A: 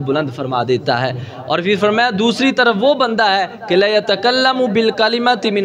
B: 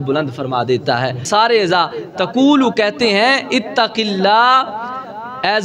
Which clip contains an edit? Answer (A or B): B